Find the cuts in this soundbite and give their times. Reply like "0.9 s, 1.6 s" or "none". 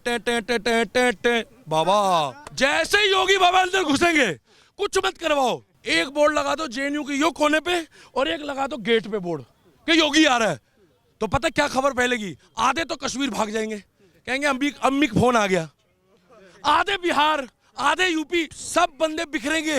2.4 s, 5.7 s, 18.6 s